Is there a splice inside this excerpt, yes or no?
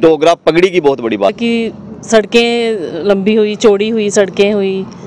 yes